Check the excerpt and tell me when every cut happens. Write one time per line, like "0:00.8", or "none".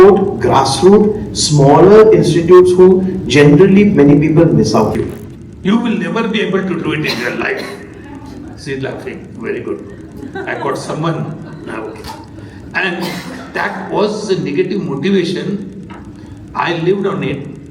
0:05.0